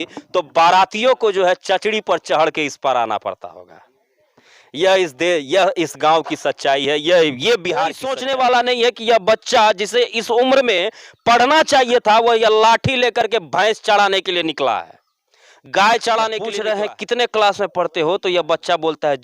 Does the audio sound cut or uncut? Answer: cut